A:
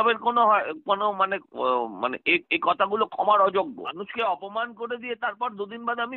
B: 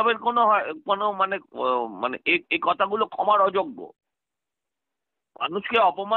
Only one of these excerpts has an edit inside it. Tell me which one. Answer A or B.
A